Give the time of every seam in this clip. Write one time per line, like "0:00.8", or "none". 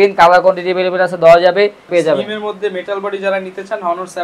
0:01.9